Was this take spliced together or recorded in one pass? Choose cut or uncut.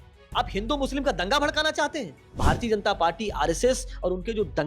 cut